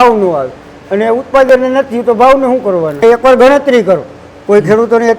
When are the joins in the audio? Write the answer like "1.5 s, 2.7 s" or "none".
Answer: 3.0 s